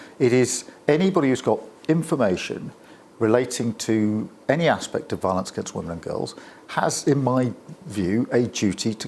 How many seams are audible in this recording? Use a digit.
0